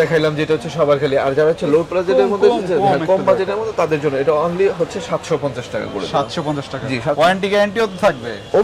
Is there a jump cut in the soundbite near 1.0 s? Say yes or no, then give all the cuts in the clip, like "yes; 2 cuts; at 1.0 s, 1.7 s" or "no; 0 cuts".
no; 0 cuts